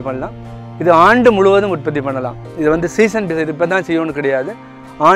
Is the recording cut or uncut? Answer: uncut